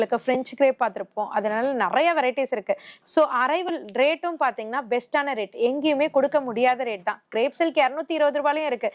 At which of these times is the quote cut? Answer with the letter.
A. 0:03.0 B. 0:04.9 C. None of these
A